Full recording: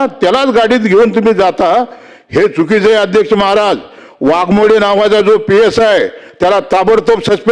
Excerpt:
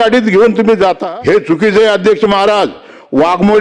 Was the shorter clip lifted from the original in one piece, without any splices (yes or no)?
no